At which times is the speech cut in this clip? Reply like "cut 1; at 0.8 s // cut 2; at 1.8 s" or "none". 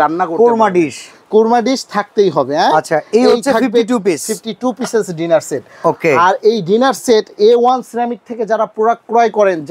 none